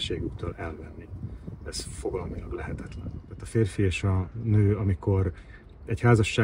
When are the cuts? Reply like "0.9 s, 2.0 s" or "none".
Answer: 3.3 s